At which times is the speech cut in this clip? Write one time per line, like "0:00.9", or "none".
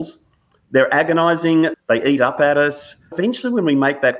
0:01.7
0:03.1